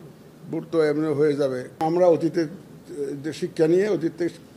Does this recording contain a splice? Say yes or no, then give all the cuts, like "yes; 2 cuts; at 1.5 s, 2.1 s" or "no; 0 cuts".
yes; 1 cut; at 1.8 s